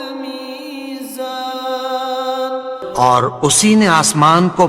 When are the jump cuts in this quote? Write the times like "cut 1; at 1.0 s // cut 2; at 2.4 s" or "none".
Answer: cut 1; at 2.6 s